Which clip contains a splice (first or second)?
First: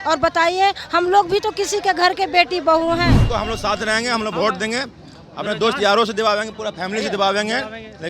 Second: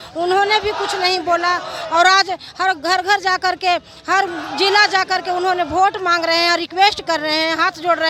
first